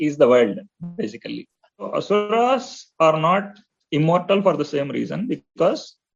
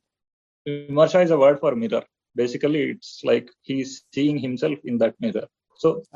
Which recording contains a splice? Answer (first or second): first